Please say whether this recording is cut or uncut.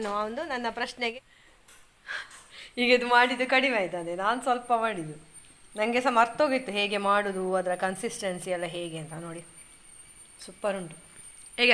cut